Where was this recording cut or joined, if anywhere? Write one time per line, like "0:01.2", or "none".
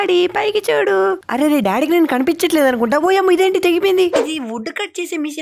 0:01.2
0:04.2